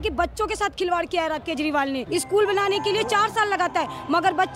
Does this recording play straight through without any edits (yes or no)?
no